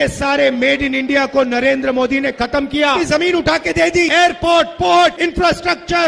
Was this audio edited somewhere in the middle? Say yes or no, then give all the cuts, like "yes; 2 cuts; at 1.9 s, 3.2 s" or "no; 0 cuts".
yes; 1 cut; at 3.0 s